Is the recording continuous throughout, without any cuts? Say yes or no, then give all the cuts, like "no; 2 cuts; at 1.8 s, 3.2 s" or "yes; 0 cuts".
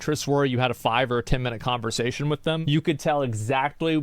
no; 1 cut; at 2.6 s